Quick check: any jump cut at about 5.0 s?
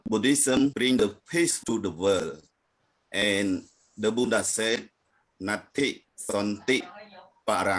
no; 2 cuts; at 0.7 s, 1.6 s

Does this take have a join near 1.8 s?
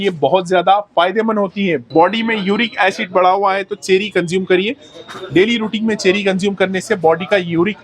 yes; 1 cut; at 1.8 s

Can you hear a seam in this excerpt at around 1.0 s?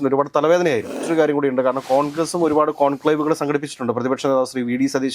yes; 1 cut; at 1.0 s

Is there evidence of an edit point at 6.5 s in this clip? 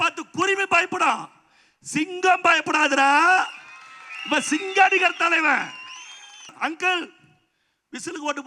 yes; 1 cut; at 6.5 s

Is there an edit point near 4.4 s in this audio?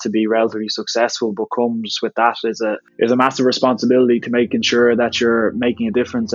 no; 1 cut; at 2.9 s

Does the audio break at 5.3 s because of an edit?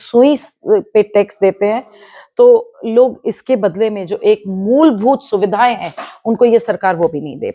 no; 0 cuts

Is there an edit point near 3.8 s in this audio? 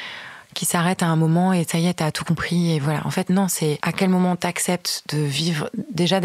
yes; 1 cut; at 3.8 s

